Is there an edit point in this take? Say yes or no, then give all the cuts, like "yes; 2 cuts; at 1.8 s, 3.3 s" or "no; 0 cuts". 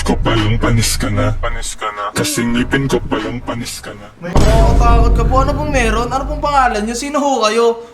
no; 0 cuts